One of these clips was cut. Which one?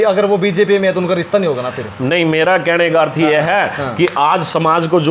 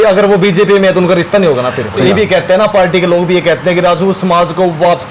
second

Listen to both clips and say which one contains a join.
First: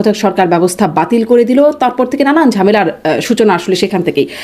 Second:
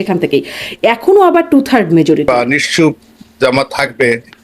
second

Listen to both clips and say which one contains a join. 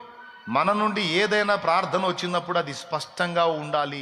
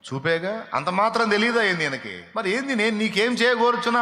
second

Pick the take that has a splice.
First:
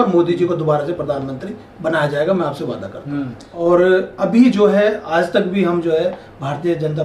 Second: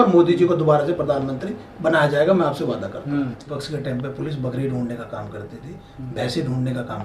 second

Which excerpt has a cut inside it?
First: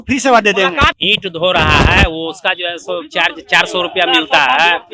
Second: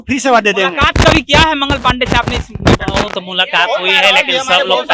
first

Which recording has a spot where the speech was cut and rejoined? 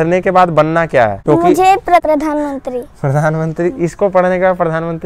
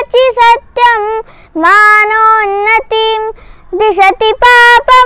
first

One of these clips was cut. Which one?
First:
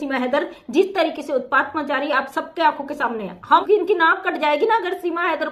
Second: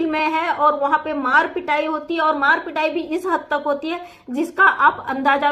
first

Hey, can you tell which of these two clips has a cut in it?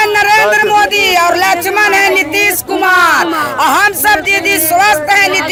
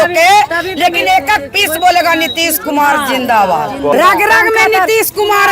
second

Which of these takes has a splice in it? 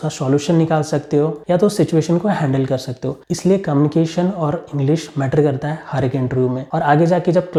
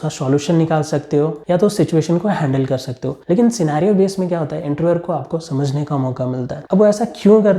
second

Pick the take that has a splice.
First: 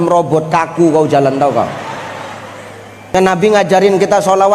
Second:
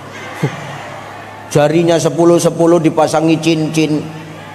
first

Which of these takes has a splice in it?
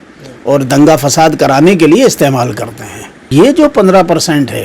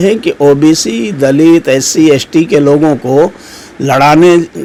first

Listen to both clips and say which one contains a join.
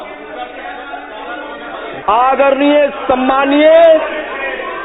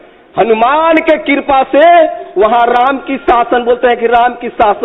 first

